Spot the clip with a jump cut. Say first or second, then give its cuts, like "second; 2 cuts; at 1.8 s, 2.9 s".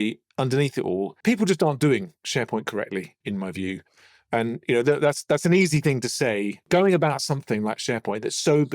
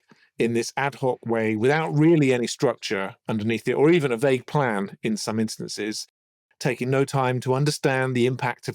first; 3 cuts; at 1.2 s, 3.1 s, 6.6 s